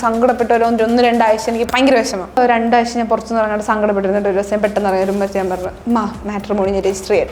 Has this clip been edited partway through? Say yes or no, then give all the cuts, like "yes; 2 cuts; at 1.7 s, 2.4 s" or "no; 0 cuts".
yes; 1 cut; at 2.4 s